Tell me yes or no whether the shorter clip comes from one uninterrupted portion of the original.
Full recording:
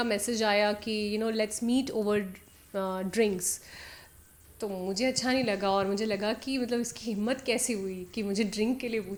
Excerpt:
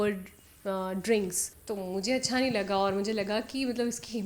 no